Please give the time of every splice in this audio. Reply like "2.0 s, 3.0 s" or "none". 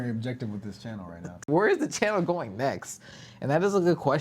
1.5 s